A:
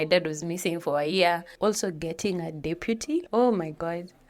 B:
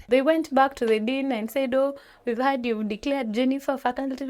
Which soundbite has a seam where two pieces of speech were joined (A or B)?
A